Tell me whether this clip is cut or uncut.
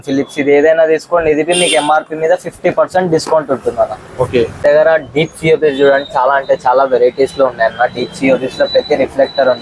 cut